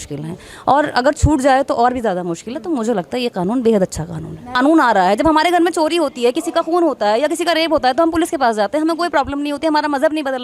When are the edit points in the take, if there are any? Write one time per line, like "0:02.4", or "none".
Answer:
0:04.5